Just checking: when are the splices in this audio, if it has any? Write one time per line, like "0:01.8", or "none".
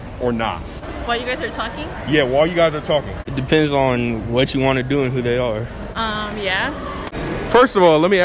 none